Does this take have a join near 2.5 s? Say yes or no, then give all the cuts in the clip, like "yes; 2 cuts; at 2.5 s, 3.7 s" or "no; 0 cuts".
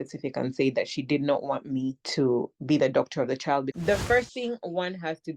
no; 1 cut; at 3.7 s